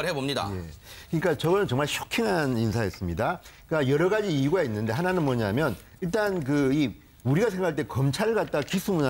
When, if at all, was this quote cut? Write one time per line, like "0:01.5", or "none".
none